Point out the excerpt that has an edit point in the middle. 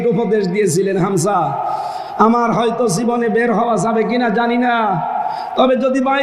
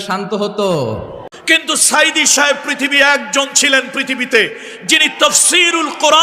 second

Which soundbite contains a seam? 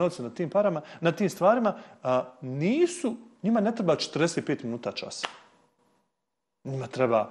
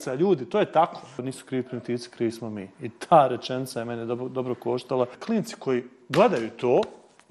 second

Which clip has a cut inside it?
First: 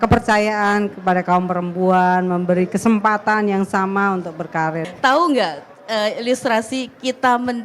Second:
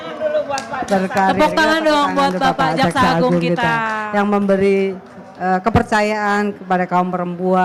first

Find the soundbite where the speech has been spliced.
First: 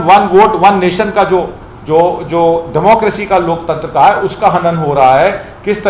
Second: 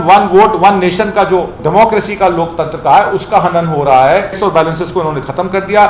second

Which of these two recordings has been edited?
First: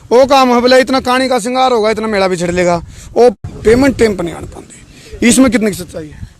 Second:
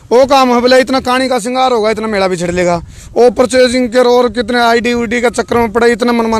first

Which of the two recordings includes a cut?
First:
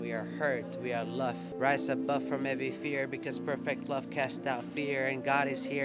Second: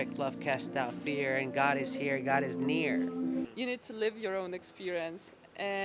second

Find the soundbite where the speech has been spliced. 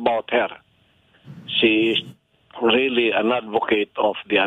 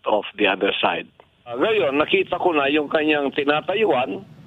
second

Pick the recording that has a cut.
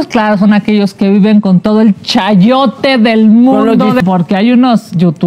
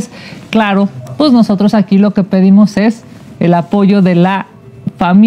first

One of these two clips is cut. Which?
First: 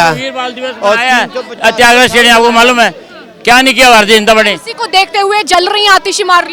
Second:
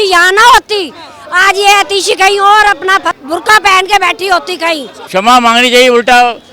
second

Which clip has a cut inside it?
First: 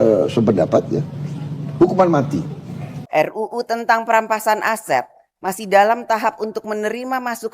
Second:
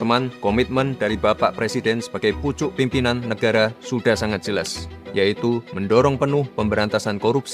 first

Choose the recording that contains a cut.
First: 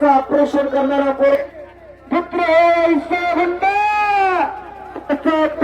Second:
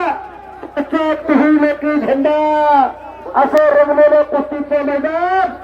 first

